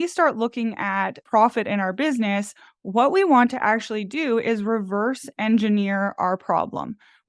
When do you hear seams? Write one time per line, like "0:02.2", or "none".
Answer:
0:01.2